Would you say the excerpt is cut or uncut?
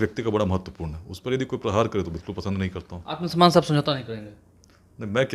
uncut